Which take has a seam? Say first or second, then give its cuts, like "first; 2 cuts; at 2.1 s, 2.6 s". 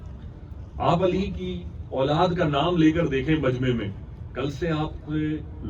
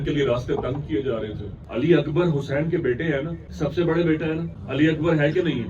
second; 1 cut; at 1.5 s